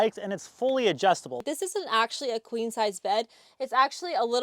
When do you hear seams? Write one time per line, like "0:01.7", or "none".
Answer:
0:01.4